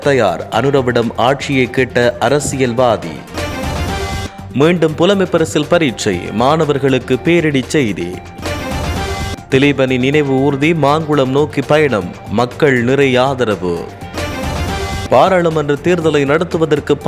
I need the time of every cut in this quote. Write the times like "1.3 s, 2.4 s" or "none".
8.3 s, 9.4 s